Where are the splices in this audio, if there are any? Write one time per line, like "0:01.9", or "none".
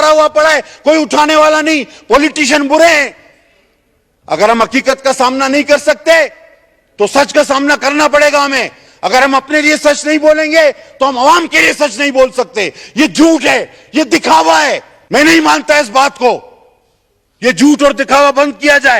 0:14.9